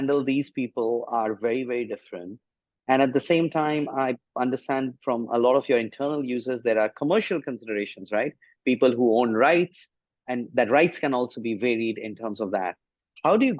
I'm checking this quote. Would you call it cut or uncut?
uncut